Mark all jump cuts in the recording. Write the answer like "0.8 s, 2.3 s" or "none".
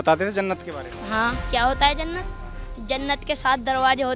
1.4 s